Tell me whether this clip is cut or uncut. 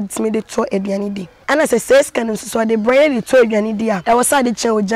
cut